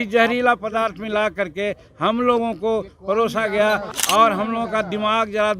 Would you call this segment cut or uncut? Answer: cut